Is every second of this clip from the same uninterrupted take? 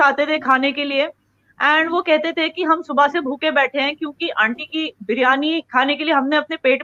yes; 0 cuts

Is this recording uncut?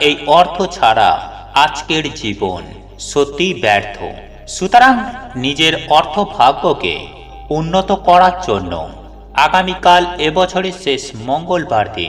yes; 0 cuts

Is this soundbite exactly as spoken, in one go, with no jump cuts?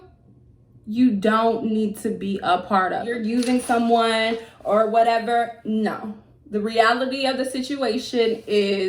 no; 1 cut; at 3.1 s

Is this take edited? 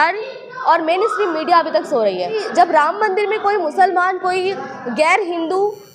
yes; 1 cut; at 2.4 s

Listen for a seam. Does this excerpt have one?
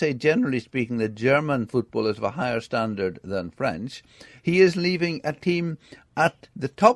no; 0 cuts

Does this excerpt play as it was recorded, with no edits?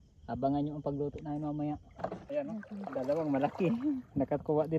no; 1 cut; at 2.2 s

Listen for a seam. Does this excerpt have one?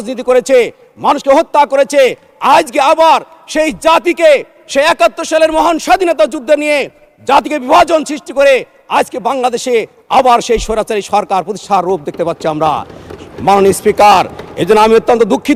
no; 0 cuts

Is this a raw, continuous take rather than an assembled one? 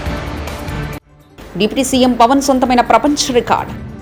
yes; 0 cuts

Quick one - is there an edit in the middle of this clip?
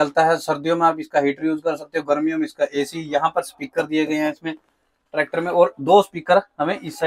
no; 0 cuts

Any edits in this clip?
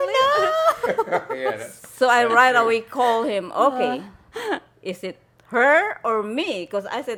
no; 0 cuts

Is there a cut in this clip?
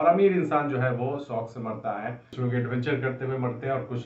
yes; 1 cut; at 2.3 s

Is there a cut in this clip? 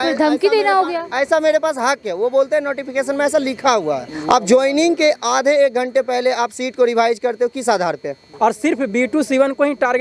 yes; 2 cuts; at 4.1 s, 8.2 s

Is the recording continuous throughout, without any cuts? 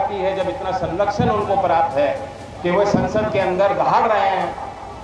yes; 0 cuts

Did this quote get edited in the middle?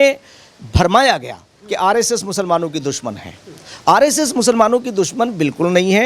no; 0 cuts

